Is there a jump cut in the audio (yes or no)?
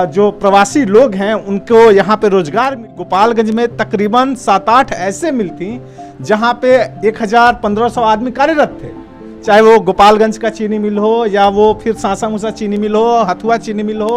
yes